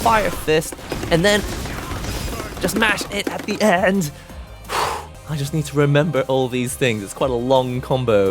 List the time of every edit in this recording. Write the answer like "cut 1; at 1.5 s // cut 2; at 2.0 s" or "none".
none